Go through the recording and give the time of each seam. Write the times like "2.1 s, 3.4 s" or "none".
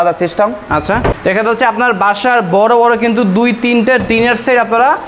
1.2 s